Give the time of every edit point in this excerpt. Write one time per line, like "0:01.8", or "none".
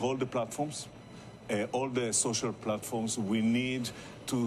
0:02.3